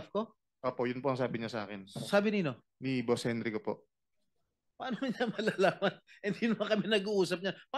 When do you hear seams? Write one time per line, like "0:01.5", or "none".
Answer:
none